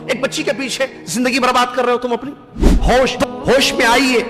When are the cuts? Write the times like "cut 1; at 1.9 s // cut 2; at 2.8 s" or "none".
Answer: cut 1; at 2.8 s